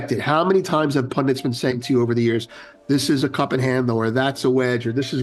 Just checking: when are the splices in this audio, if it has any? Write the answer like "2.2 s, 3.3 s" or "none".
none